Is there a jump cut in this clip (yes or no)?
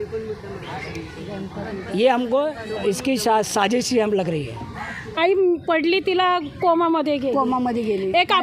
yes